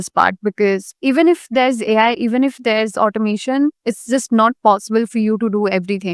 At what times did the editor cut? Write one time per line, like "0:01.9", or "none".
0:00.9